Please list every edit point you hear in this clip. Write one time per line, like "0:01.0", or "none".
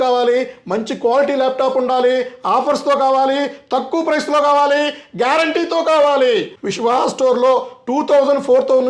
0:06.5